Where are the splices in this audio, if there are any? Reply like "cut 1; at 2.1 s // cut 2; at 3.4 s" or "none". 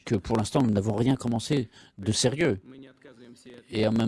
cut 1; at 1.0 s